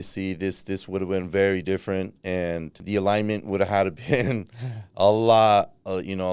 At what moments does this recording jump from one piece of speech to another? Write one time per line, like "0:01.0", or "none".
0:02.8